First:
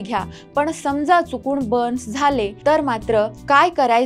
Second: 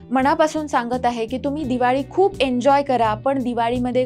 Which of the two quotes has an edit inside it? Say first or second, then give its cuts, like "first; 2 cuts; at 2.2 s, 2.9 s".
first; 1 cut; at 2.8 s